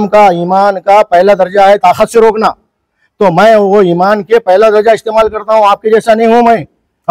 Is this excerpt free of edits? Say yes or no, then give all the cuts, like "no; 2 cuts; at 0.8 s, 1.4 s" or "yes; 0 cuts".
yes; 0 cuts